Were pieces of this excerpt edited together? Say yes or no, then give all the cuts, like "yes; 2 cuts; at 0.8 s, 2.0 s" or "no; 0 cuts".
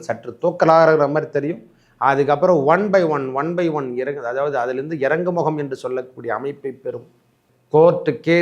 yes; 1 cut; at 7.5 s